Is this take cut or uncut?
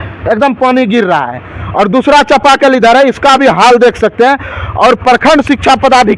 uncut